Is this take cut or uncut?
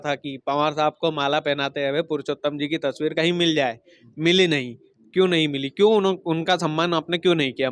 uncut